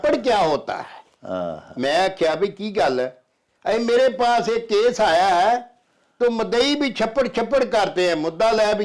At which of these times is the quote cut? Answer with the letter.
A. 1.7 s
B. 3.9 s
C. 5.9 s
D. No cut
D